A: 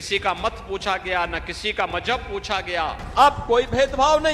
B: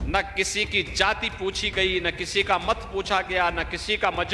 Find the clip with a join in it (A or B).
A